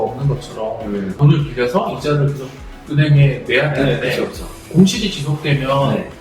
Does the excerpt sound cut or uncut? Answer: uncut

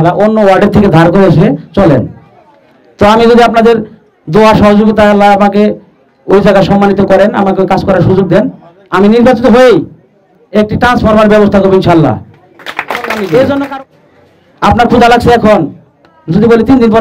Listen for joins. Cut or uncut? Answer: cut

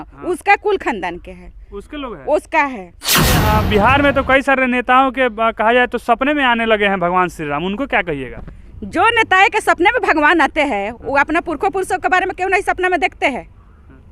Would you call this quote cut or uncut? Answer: cut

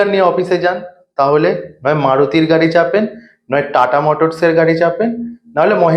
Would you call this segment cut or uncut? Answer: uncut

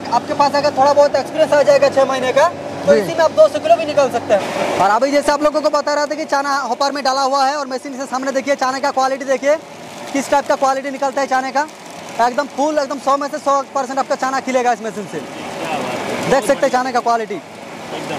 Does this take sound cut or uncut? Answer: uncut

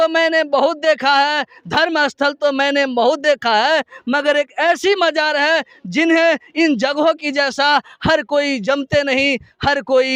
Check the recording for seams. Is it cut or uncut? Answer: uncut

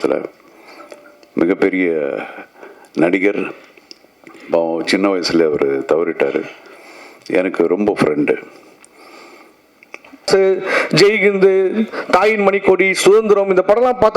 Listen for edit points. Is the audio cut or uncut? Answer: cut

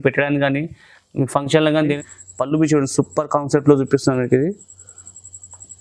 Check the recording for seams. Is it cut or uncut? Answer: cut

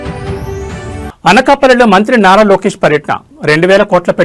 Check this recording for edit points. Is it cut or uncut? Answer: cut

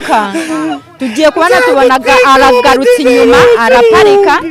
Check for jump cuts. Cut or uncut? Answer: uncut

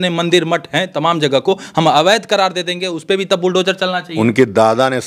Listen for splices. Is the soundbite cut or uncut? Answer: uncut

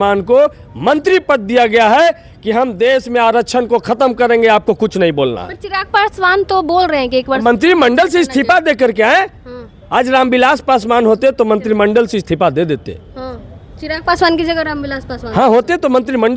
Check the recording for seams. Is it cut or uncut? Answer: uncut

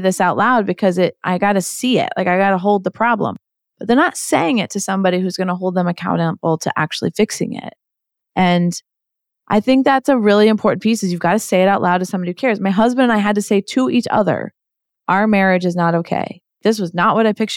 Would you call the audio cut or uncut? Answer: cut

